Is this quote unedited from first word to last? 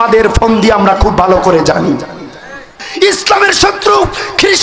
no; 1 cut; at 2.8 s

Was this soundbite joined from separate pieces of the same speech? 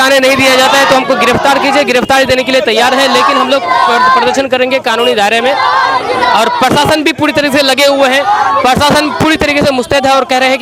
no; 0 cuts

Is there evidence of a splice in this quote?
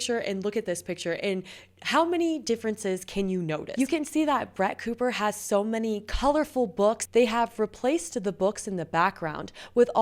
yes; 2 cuts; at 3.7 s, 7.0 s

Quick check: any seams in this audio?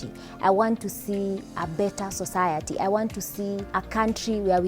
yes; 1 cut; at 3.6 s

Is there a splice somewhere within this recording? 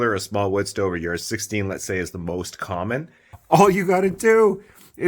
yes; 1 cut; at 3.3 s

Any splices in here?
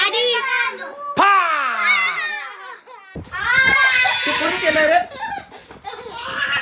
yes; 1 cut; at 3.2 s

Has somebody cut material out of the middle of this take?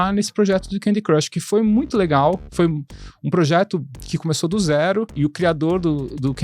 yes; 1 cut; at 5.1 s

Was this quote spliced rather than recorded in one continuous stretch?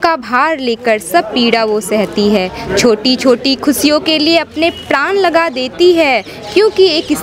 no; 0 cuts

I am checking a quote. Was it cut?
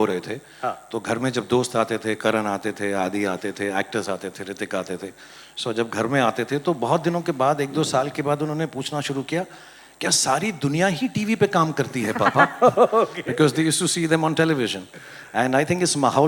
no; 0 cuts

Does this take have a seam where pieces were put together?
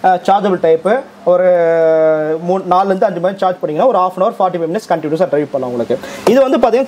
no; 0 cuts

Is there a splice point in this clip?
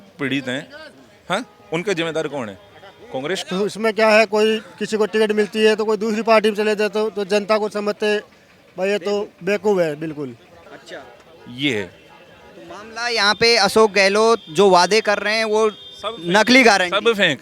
yes; 2 cuts; at 3.4 s, 10.8 s

